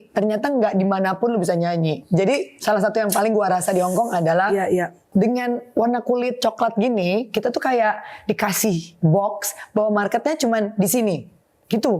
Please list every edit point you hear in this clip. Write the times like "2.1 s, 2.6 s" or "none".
5.0 s